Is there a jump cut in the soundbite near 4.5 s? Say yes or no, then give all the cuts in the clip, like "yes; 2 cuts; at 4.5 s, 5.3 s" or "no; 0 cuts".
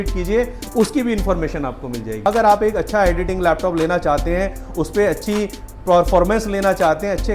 no; 1 cut; at 2.3 s